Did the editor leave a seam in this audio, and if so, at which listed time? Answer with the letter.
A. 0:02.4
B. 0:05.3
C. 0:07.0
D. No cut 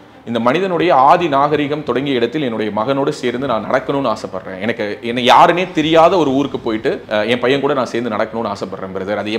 C